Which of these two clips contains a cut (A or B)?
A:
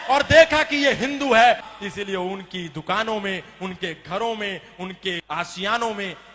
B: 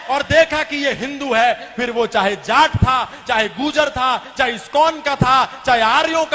A